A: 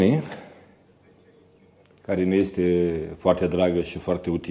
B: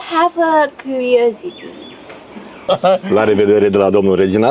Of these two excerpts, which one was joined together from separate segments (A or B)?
B